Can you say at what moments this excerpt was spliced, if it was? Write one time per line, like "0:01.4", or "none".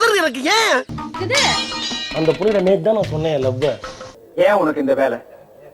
0:01.0